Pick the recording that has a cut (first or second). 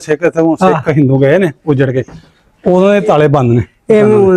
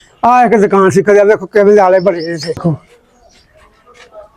second